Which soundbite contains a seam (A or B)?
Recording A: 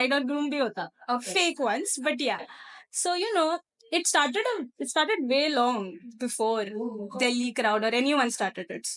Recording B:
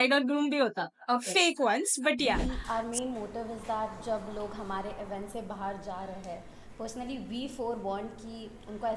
B